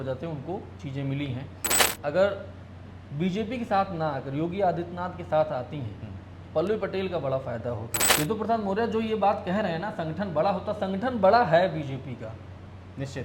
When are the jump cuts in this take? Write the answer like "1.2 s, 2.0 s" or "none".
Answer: 1.9 s, 8.0 s